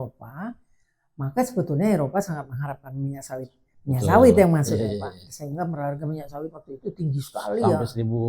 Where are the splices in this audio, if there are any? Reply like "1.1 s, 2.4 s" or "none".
none